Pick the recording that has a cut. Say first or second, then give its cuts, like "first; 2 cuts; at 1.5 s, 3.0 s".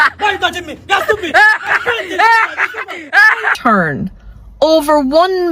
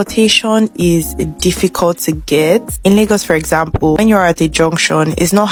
first; 1 cut; at 3.6 s